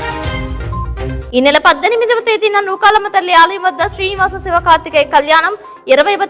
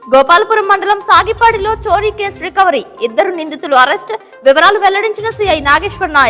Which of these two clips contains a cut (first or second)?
first